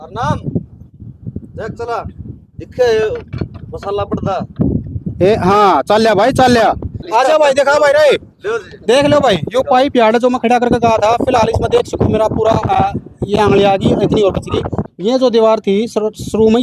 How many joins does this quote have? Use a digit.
2